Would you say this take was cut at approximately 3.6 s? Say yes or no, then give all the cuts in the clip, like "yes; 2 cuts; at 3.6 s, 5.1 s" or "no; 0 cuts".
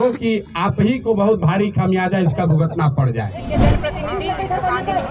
yes; 1 cut; at 3.6 s